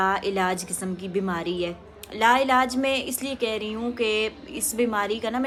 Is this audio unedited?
yes; 0 cuts

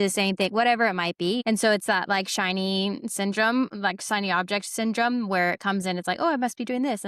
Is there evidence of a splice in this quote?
yes; 1 cut; at 1.4 s

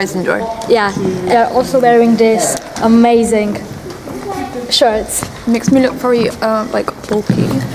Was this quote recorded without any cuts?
no; 1 cut; at 1.2 s

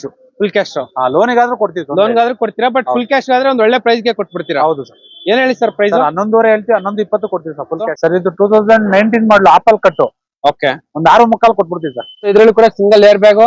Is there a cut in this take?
yes; 2 cuts; at 7.9 s, 12.3 s

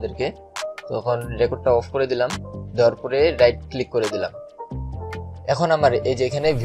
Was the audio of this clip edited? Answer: no; 0 cuts

